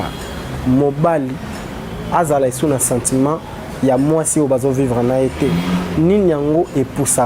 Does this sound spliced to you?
no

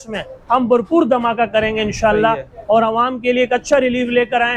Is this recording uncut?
yes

